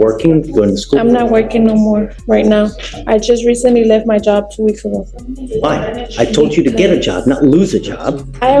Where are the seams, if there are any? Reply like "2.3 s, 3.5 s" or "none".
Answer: none